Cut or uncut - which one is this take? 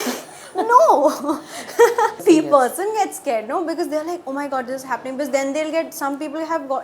cut